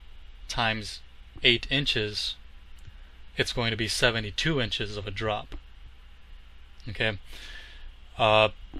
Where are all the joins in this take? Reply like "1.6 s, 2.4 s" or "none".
2.5 s